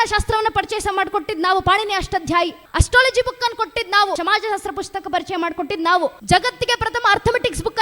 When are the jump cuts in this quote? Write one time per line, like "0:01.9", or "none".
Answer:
0:02.7
0:04.2
0:06.2